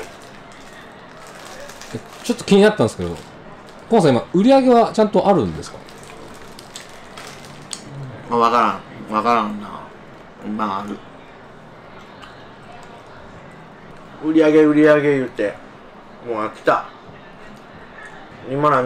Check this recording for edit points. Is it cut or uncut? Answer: uncut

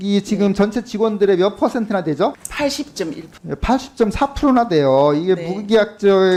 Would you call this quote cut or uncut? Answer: uncut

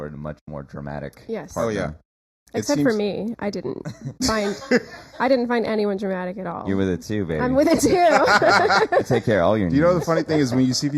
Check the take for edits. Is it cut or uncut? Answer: uncut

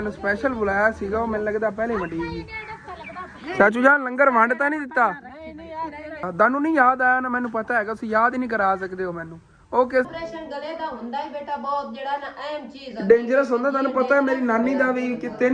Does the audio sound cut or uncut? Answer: cut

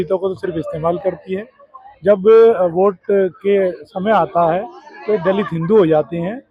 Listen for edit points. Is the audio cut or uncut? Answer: uncut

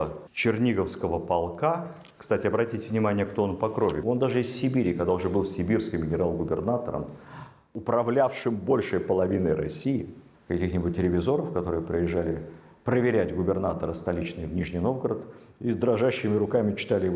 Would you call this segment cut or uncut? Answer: cut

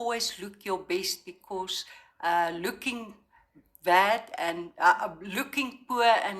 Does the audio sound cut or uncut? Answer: uncut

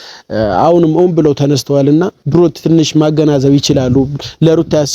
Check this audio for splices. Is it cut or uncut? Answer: cut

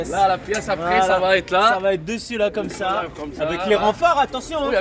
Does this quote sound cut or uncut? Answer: uncut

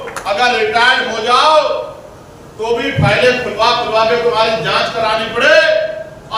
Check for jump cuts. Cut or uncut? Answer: uncut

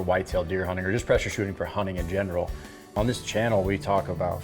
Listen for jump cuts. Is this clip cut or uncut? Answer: cut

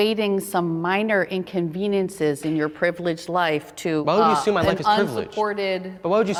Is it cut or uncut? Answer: uncut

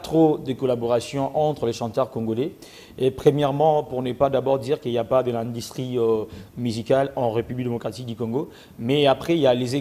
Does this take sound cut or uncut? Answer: uncut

